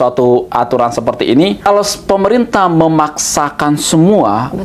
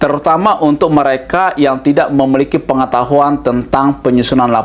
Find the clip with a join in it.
first; 1 cut; at 1.7 s

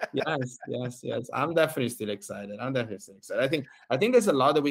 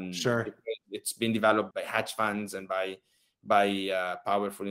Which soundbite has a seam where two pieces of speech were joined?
second; 1 cut; at 1.7 s

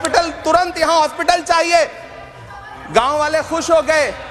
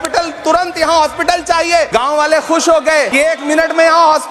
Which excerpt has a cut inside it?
second; 2 cuts; at 1.9 s, 3.1 s

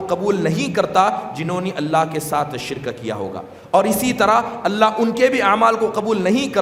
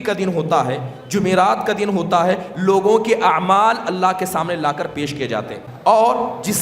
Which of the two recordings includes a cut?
second; 1 cut; at 5.6 s

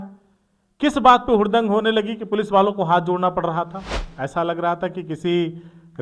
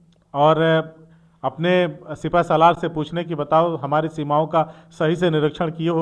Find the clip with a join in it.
first; 1 cut; at 4.1 s

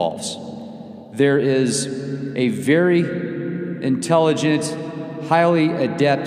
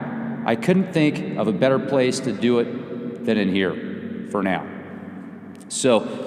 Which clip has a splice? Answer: second; 1 cut; at 3.8 s

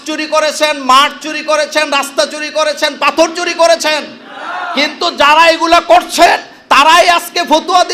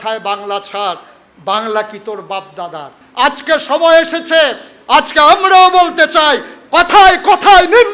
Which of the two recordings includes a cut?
second; 1 cut; at 3.0 s

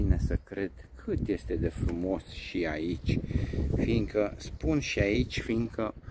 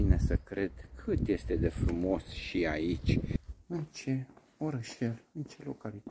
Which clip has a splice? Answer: second; 1 cut; at 3.4 s

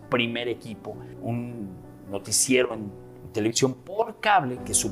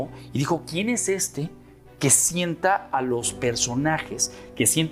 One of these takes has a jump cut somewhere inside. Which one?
first; 1 cut; at 1.1 s

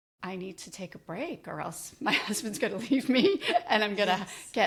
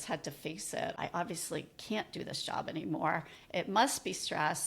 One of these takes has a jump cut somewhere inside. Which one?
second; 1 cut; at 1.0 s

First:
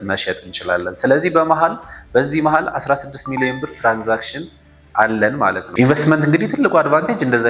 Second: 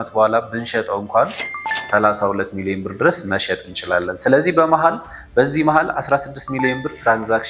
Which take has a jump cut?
first; 1 cut; at 5.7 s

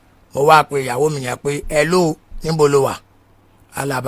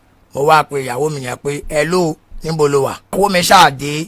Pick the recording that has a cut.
second; 1 cut; at 3.1 s

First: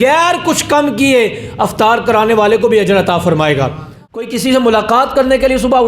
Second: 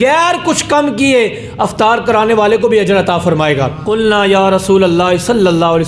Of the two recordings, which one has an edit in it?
first; 1 cut; at 3.8 s

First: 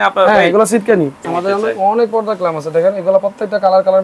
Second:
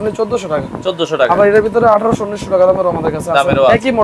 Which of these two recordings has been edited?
first; 1 cut; at 1.2 s

